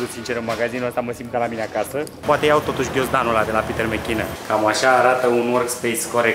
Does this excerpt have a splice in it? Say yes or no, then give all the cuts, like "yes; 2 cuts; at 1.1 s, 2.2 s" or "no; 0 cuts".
yes; 2 cuts; at 2.2 s, 4.4 s